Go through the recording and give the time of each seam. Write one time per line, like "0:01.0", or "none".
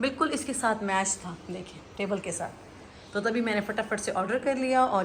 none